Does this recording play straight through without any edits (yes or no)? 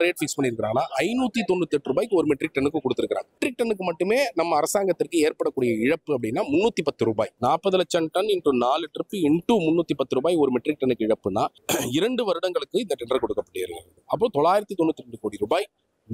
no